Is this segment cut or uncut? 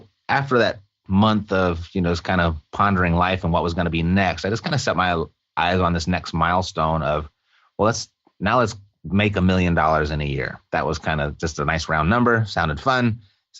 cut